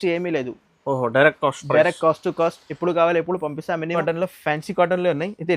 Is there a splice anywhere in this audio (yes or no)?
yes